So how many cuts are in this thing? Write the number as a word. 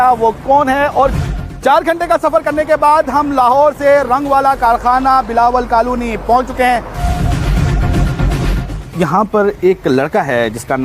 two